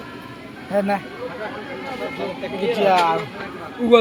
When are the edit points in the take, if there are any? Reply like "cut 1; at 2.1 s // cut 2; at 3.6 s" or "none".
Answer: none